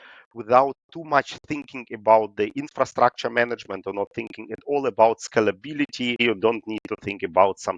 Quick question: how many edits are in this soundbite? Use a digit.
1